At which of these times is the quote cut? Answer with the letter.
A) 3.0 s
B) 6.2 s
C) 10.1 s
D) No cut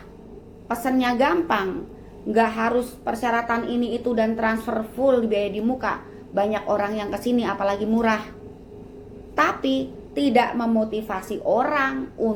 D